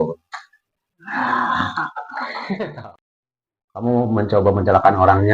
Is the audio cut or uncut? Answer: cut